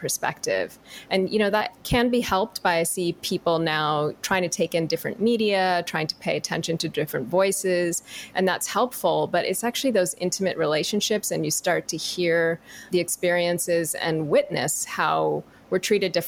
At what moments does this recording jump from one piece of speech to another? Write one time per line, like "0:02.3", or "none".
0:01.7
0:04.2
0:12.8